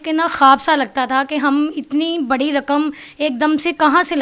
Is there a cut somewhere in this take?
no; 0 cuts

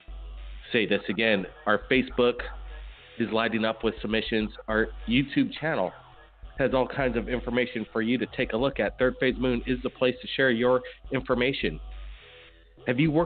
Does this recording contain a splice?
no; 0 cuts

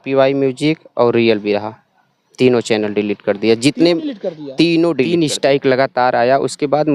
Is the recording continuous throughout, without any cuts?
no; 1 cut; at 5.1 s

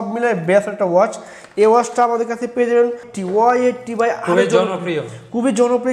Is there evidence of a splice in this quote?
yes; 1 cut; at 3.1 s

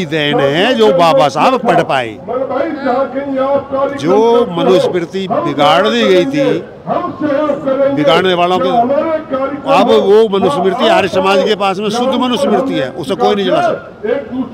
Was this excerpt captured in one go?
yes; 0 cuts

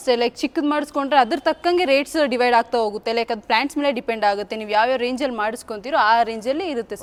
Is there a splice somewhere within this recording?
no; 0 cuts

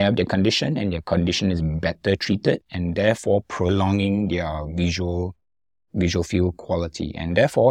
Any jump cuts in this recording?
no; 0 cuts

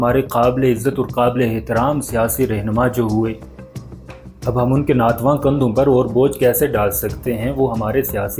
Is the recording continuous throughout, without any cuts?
yes; 0 cuts

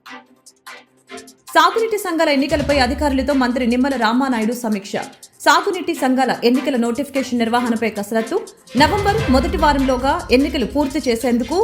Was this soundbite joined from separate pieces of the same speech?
yes; 1 cut; at 1.3 s

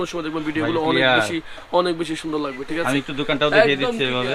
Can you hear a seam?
no; 0 cuts

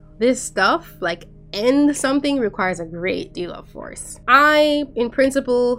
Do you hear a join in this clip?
no; 0 cuts

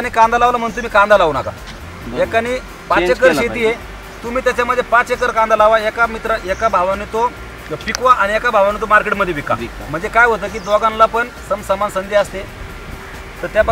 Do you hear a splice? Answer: no; 0 cuts

